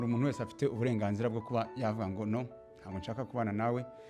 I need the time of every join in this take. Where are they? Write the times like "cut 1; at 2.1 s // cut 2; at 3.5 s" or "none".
none